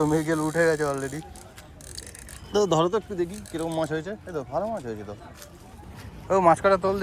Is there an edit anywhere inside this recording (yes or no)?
yes